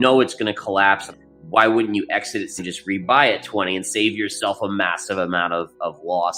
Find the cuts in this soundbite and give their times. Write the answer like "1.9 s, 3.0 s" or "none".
1.2 s, 2.6 s